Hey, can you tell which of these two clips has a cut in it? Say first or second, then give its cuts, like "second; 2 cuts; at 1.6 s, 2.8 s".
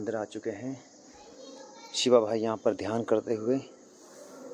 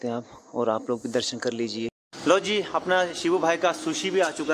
second; 1 cut; at 1.9 s